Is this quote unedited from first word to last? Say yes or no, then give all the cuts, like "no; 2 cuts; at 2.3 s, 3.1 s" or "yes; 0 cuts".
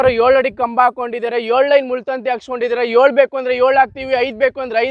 yes; 0 cuts